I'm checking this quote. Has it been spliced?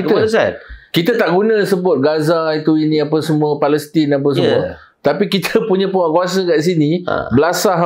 no; 0 cuts

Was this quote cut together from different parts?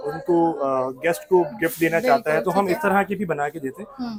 no; 0 cuts

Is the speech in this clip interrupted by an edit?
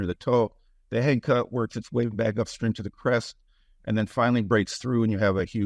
no; 0 cuts

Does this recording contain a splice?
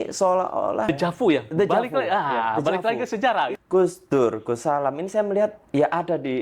yes; 2 cuts; at 0.9 s, 3.5 s

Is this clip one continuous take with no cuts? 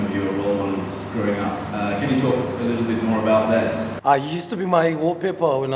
yes; 0 cuts

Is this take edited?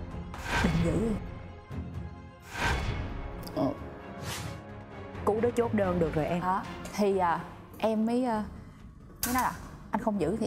no; 0 cuts

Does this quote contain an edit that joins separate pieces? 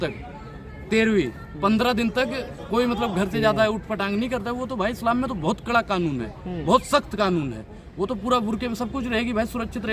no; 0 cuts

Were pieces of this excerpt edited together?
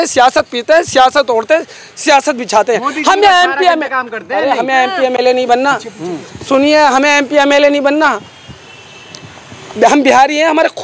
no; 0 cuts

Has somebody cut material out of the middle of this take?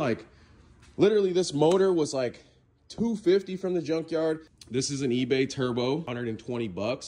yes; 2 cuts; at 4.5 s, 6.1 s

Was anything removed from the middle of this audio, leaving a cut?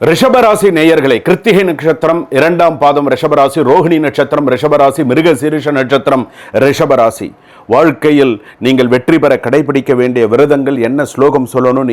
no; 0 cuts

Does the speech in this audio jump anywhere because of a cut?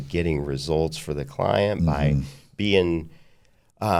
no; 0 cuts

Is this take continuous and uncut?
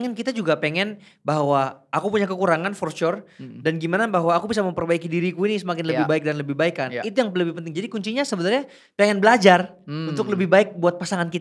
yes; 0 cuts

